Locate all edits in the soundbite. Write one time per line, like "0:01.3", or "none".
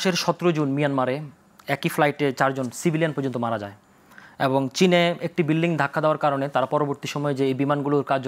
none